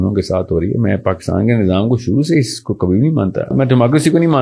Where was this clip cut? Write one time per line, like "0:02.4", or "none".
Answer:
0:03.5